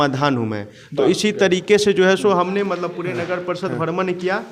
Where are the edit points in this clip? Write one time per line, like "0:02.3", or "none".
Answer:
none